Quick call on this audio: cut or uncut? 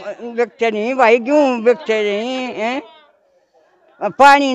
uncut